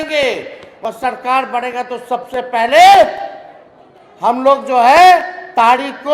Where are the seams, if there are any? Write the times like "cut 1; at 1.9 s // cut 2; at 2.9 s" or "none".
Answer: none